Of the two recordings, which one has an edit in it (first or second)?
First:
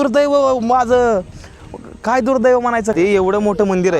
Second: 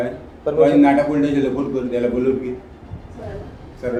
first